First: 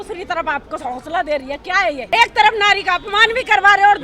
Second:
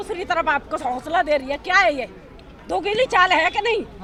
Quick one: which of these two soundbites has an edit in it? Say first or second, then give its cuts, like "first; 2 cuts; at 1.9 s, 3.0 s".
first; 1 cut; at 2.0 s